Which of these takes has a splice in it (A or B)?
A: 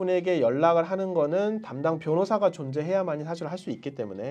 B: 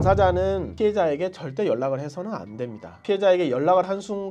B